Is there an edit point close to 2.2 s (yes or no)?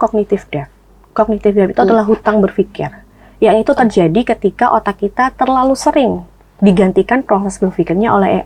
no